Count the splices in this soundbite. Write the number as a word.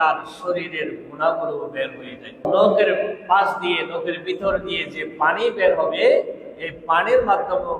one